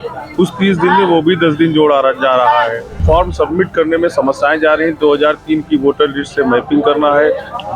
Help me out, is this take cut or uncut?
cut